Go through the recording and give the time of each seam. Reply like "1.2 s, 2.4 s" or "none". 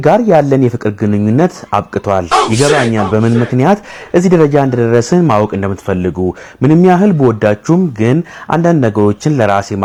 none

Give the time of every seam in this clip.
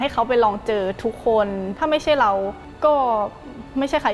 1.7 s, 2.6 s

